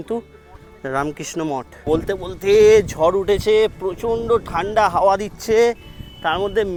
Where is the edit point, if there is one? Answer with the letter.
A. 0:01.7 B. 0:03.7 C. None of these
C